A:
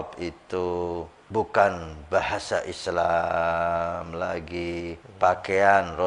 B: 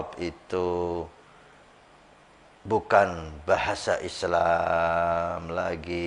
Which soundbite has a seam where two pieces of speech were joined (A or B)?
A